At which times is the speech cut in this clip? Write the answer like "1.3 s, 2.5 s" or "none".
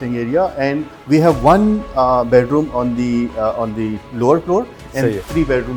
none